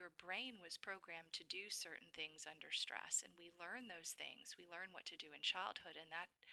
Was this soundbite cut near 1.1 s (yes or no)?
no